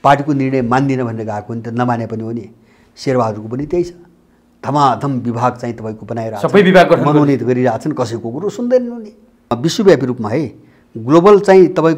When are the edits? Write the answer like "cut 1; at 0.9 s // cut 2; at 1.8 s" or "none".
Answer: cut 1; at 9.6 s